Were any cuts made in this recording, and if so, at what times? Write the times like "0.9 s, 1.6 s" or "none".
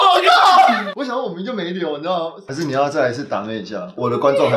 2.4 s